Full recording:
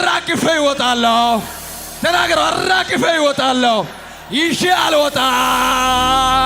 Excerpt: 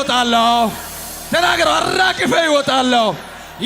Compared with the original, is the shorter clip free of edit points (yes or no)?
yes